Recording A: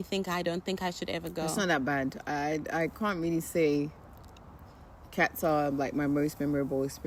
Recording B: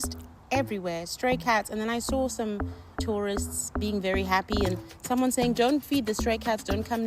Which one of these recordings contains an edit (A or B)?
B